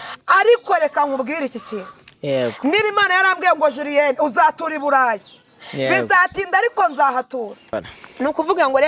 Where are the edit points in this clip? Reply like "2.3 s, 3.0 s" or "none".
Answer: 7.8 s